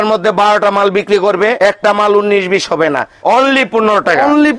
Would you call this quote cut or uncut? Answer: cut